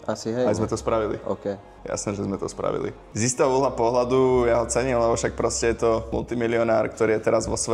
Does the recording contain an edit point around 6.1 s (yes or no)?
yes